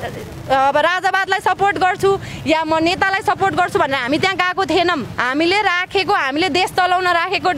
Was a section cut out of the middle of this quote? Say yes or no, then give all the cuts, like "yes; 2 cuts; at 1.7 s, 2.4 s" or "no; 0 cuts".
yes; 1 cut; at 5.1 s